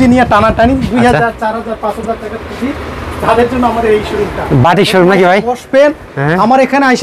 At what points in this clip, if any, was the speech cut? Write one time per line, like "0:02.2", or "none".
none